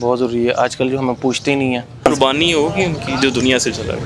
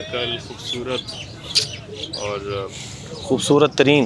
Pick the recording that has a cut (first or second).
first